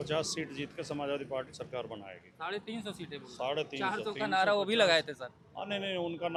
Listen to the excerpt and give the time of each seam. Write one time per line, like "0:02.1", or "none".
none